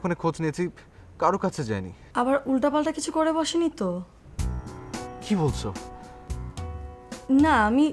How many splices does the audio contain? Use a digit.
1